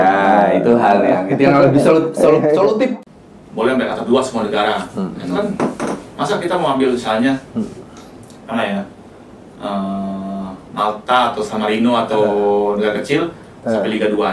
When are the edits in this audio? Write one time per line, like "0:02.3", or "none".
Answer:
0:02.9